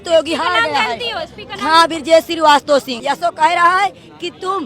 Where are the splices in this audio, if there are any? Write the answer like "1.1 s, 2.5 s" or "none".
2.9 s